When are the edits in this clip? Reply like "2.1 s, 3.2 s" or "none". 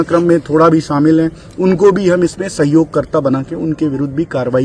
none